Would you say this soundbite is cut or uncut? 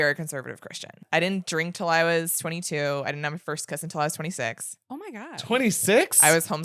cut